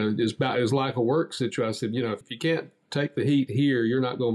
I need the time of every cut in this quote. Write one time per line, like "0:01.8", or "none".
0:02.2